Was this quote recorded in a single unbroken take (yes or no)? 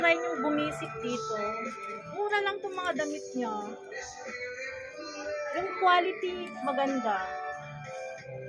yes